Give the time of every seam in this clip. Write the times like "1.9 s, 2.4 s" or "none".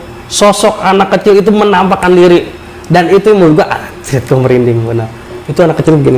none